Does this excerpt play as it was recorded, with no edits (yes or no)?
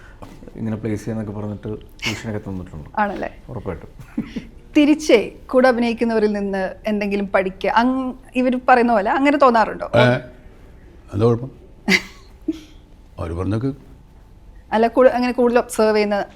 yes